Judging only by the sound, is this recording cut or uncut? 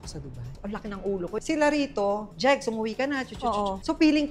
cut